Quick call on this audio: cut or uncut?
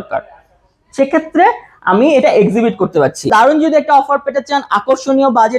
cut